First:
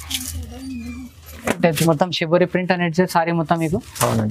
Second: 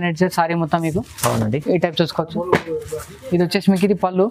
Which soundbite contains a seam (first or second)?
first